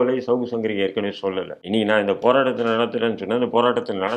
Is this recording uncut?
no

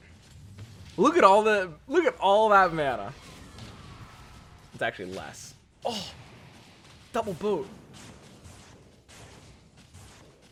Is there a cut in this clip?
no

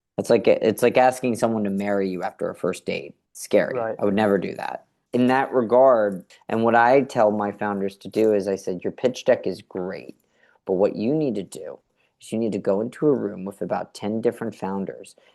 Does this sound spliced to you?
no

